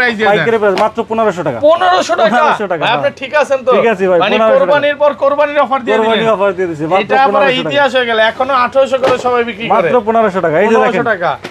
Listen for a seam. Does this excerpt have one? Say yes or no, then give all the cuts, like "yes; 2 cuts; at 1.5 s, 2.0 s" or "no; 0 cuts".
no; 0 cuts